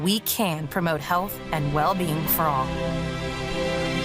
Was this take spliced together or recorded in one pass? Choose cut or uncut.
cut